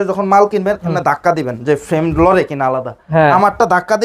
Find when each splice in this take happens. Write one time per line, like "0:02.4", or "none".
none